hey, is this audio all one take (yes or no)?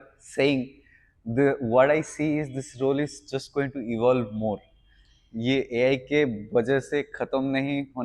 yes